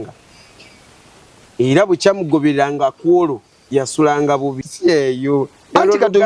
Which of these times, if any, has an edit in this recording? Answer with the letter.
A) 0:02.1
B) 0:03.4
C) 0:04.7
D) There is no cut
C